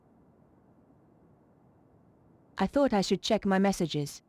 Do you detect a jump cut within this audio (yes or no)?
yes